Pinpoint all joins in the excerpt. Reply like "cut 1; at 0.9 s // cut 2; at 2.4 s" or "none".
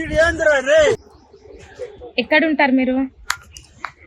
cut 1; at 1.1 s